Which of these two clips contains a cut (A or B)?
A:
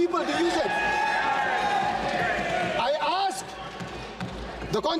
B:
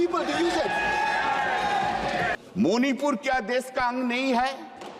B